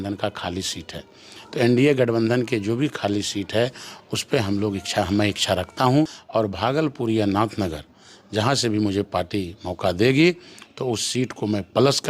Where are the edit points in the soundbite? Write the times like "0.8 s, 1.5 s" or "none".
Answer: 6.2 s